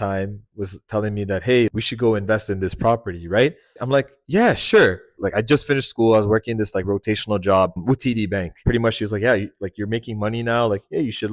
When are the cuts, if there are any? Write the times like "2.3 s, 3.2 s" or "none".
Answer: 1.7 s, 3.7 s, 5.1 s